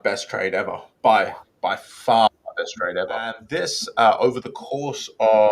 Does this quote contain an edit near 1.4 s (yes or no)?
no